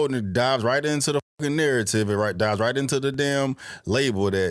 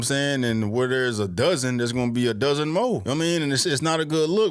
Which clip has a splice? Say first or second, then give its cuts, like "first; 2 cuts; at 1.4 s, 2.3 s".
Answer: second; 1 cut; at 3.0 s